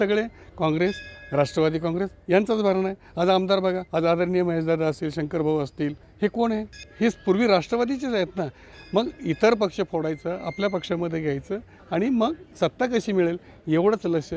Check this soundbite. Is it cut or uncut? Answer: cut